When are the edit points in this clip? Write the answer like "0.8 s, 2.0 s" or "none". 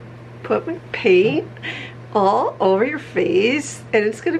none